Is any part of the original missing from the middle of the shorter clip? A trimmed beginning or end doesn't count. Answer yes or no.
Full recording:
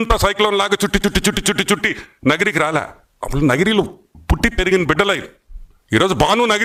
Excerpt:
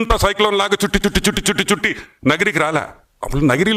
no